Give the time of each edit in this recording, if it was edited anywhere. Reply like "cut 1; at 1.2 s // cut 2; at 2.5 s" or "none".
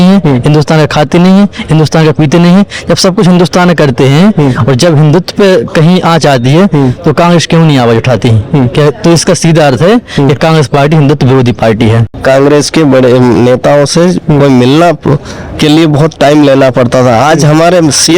cut 1; at 12.1 s